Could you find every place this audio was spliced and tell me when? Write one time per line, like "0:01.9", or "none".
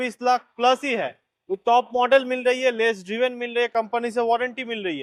none